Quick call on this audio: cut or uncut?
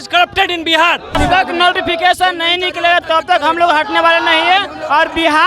cut